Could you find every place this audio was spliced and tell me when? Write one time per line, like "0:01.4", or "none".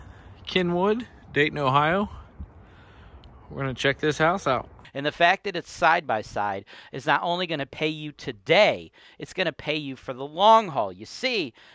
0:04.8